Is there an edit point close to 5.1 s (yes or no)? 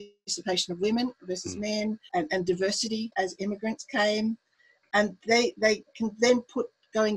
no